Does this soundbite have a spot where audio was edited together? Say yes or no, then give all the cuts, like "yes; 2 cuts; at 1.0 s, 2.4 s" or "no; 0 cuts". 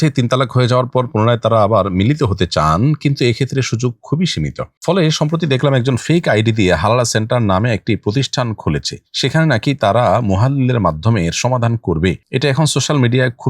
no; 0 cuts